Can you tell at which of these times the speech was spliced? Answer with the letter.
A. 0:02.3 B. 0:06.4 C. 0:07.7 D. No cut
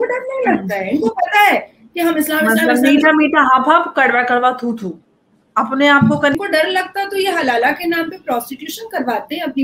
B